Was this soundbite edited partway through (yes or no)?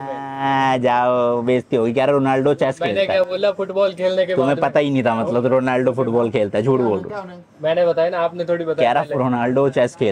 no